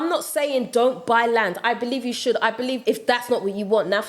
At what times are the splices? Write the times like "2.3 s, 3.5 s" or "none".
2.8 s